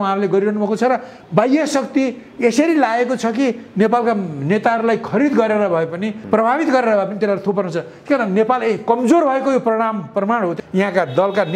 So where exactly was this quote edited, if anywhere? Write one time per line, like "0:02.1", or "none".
0:06.1
0:10.6